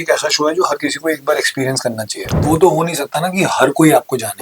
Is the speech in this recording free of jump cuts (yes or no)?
no